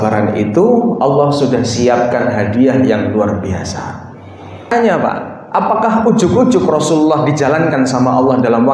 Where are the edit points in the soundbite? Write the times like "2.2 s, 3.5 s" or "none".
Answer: 4.7 s